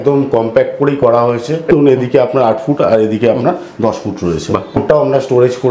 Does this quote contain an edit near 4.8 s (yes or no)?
yes